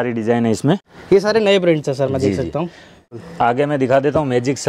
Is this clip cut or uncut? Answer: cut